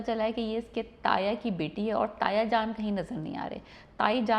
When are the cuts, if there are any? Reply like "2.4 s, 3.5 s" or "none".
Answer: none